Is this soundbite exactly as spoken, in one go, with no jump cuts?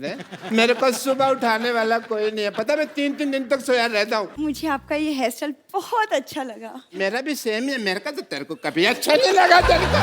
no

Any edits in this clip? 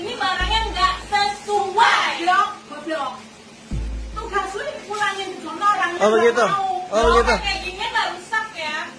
no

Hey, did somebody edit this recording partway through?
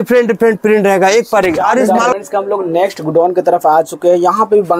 yes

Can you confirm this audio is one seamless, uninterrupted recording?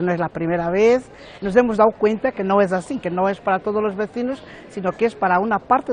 no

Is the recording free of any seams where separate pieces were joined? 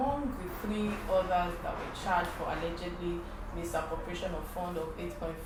yes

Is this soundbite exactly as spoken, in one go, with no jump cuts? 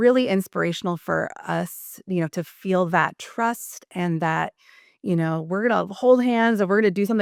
yes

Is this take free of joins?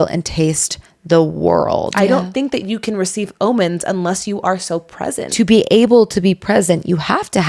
no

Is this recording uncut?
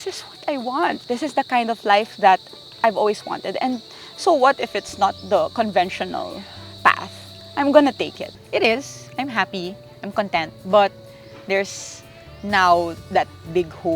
no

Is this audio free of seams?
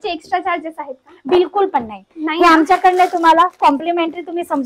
yes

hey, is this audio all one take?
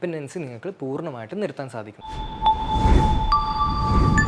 no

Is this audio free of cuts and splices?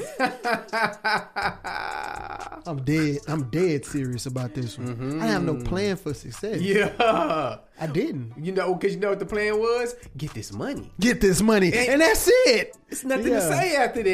no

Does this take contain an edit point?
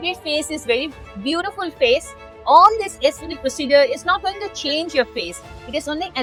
no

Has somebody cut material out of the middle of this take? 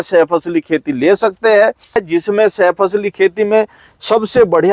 yes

